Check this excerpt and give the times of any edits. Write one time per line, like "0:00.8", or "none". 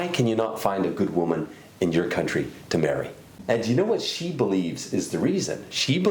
0:03.3